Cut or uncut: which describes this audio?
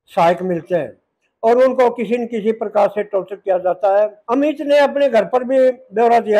cut